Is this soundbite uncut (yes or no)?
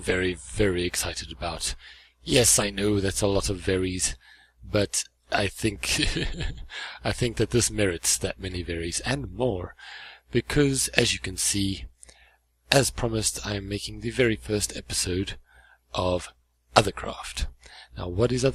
yes